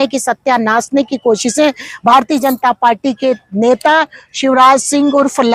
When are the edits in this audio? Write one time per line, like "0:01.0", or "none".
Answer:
none